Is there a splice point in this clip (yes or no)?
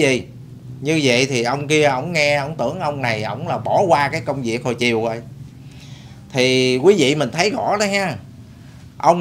no